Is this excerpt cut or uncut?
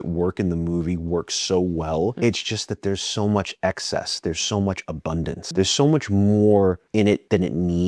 cut